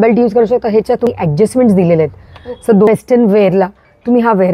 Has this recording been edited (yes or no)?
yes